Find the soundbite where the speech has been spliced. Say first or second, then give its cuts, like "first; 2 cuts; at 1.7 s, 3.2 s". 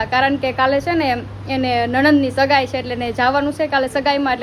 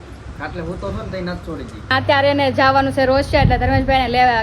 second; 1 cut; at 1.9 s